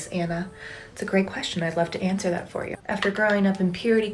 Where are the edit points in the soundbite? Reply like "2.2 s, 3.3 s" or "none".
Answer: none